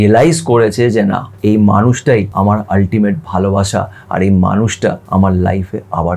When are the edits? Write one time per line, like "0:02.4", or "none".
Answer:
0:01.3
0:02.3
0:05.0

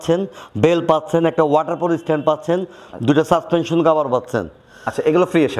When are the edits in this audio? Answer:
none

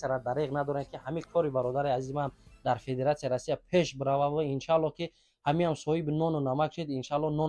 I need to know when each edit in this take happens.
none

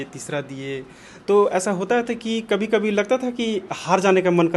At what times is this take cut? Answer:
none

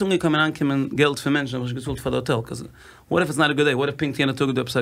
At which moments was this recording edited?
none

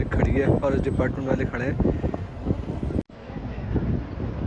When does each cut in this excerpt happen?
none

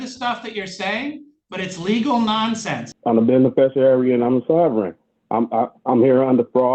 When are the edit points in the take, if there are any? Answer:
0:02.9

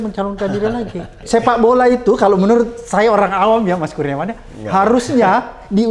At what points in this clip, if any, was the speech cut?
0:01.2

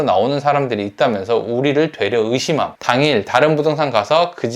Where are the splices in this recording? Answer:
0:02.8

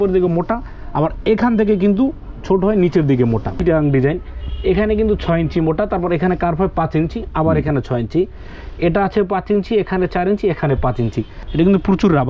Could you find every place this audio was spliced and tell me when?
0:03.6
0:11.4

